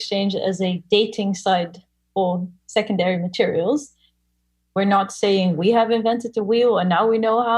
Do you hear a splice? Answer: yes; 1 cut; at 4.5 s

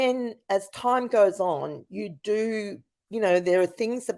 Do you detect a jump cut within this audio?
no; 0 cuts

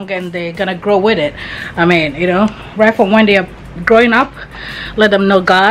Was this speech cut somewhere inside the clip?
no; 0 cuts

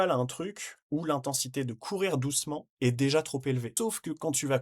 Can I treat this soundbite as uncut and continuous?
no; 2 cuts; at 2.7 s, 3.7 s

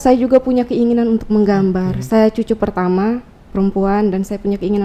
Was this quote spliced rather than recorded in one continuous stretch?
no; 0 cuts

